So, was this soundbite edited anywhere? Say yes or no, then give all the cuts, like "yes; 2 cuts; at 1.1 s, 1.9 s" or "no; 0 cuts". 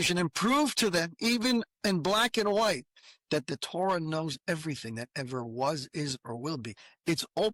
no; 0 cuts